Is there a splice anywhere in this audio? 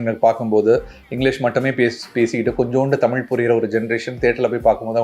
no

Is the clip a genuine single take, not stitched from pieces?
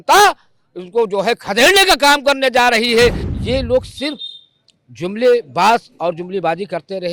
no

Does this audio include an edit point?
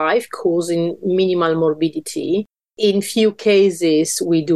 yes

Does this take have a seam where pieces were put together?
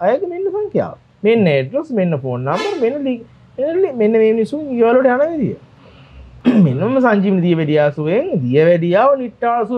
no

